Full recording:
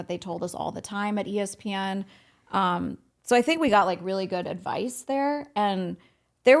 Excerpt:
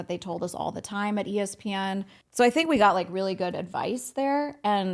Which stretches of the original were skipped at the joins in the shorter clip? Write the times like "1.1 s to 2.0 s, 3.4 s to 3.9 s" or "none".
2.2 s to 3.1 s